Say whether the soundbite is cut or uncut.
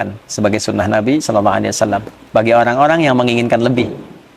cut